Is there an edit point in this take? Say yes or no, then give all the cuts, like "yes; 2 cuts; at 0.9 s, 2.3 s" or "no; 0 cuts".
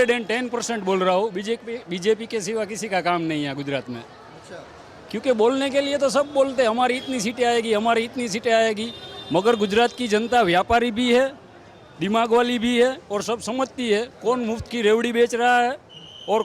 no; 0 cuts